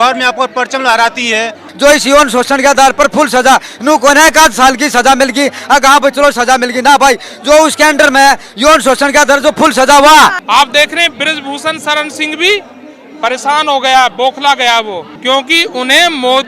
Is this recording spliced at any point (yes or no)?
yes